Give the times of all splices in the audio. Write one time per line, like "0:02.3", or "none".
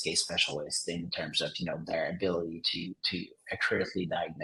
none